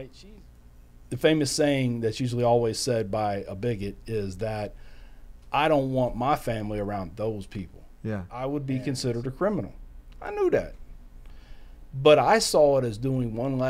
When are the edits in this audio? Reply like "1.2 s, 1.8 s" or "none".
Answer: 8.3 s